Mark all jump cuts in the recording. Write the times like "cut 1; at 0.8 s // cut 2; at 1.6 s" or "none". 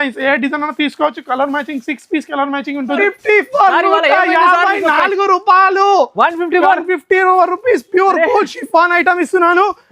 cut 1; at 3.0 s